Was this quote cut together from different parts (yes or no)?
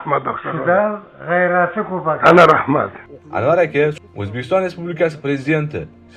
yes